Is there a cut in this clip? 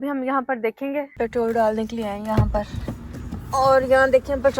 yes; 1 cut; at 1.1 s

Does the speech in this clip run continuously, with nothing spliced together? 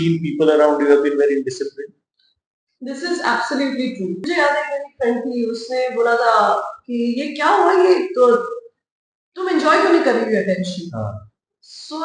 no; 1 cut; at 4.2 s

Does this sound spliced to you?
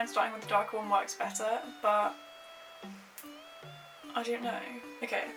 no; 0 cuts

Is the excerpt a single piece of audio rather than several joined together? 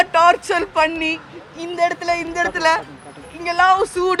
yes; 0 cuts

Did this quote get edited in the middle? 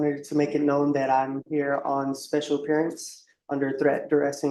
no; 0 cuts

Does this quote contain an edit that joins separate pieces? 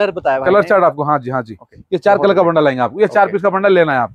no; 0 cuts

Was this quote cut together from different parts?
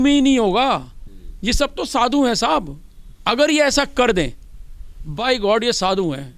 no; 0 cuts

